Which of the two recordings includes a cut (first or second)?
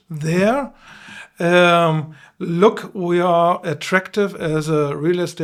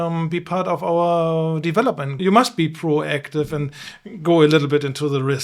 second